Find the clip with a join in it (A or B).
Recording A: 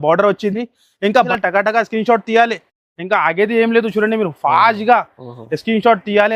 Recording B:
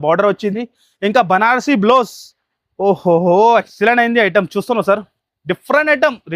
A